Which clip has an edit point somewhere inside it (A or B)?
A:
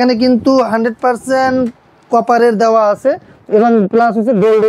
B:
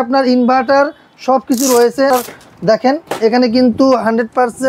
B